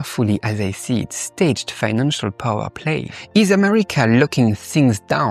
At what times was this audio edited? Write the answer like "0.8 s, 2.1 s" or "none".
3.1 s